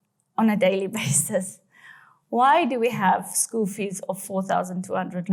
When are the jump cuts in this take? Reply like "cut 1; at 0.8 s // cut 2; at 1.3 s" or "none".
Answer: none